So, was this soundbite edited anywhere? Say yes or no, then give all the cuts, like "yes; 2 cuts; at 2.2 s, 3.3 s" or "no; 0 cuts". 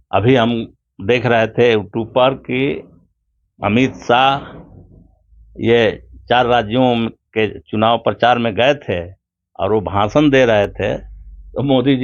no; 0 cuts